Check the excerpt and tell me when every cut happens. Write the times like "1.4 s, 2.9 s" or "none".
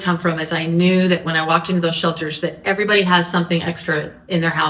none